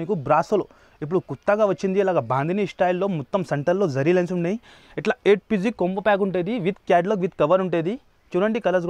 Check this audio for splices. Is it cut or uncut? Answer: uncut